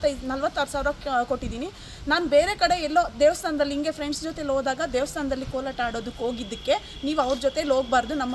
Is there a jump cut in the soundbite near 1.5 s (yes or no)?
no